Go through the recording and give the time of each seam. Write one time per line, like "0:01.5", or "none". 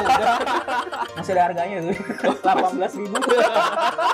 none